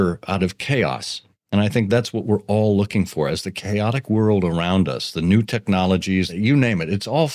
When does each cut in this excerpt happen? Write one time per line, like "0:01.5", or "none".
0:06.3